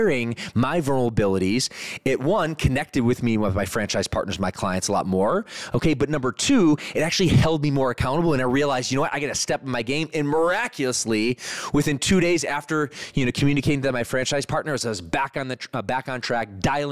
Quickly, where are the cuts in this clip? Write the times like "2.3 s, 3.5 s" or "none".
none